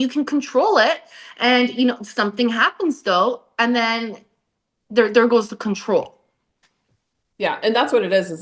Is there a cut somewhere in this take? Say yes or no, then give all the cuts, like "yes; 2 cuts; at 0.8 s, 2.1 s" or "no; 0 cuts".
no; 0 cuts